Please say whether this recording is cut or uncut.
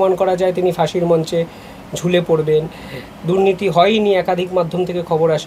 uncut